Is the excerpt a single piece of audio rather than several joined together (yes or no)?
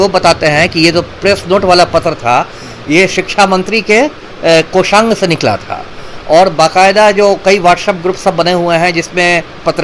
yes